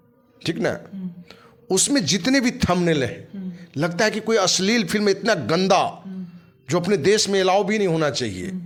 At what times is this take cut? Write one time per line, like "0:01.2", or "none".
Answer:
none